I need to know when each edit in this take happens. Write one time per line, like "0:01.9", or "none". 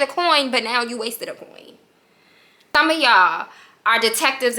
0:02.7